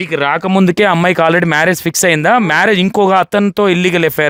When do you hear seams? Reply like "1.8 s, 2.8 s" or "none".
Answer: none